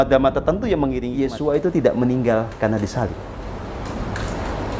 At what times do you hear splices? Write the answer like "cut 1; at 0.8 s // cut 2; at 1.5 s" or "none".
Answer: cut 1; at 1.2 s